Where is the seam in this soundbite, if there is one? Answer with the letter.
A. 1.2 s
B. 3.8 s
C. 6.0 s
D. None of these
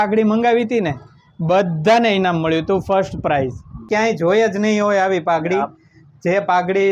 B